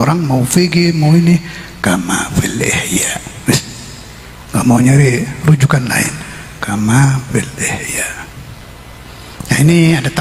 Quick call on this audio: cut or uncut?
cut